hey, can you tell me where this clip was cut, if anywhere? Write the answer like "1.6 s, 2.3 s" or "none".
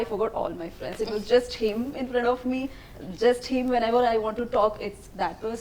none